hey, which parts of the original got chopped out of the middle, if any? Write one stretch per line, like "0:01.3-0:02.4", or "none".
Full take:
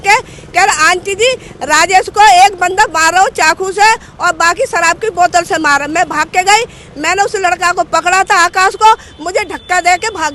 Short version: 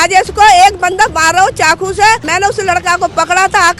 0:04.0-0:07.0

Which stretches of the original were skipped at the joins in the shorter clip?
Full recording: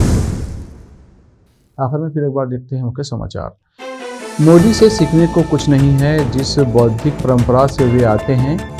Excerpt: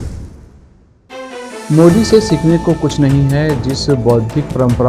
0:01.3-0:03.7

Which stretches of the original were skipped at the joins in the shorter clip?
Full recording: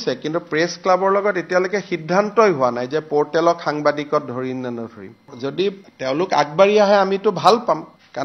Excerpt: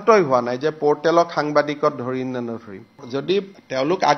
none

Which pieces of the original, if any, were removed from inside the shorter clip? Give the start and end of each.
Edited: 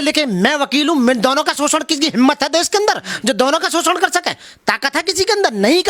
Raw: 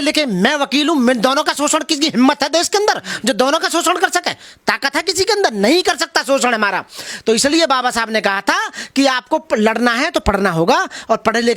none

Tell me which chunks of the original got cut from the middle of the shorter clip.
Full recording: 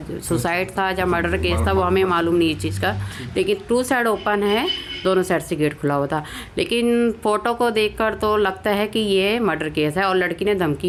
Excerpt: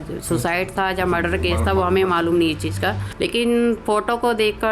0:03.1-0:06.4

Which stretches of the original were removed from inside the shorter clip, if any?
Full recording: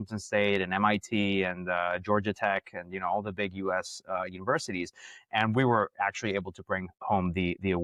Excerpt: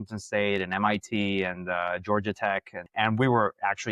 0:02.8-0:05.1

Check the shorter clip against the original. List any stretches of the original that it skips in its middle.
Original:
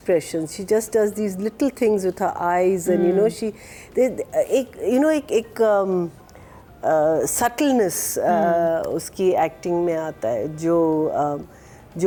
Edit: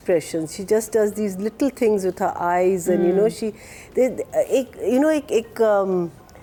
none

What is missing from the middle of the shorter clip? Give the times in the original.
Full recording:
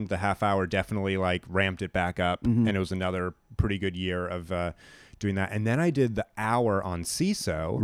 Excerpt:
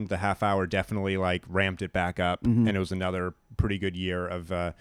none

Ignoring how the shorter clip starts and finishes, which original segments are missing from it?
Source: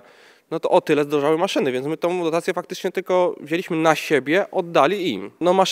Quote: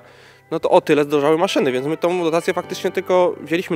none

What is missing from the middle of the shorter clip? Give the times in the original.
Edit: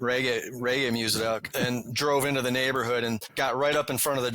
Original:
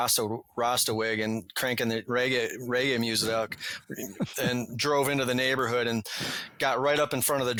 0:03.6-0:04.3
0:06.1-0:06.5

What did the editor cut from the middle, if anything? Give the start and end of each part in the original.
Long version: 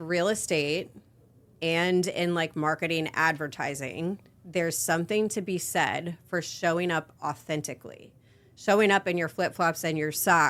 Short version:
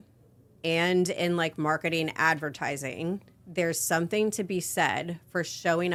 none

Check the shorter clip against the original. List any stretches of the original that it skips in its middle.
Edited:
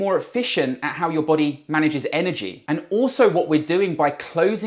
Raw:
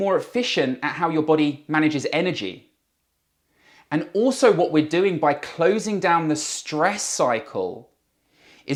0:02.5-0:03.7

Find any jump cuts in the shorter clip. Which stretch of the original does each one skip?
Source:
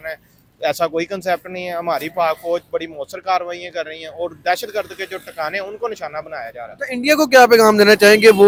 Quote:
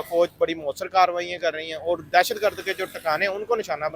none

